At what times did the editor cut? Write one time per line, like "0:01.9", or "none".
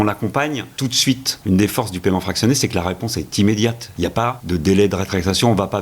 0:01.0
0:04.1